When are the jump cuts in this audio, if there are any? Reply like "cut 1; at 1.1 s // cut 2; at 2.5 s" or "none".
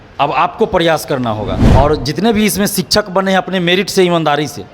cut 1; at 1.5 s